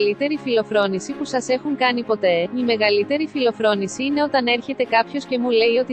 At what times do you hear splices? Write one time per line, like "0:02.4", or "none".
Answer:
none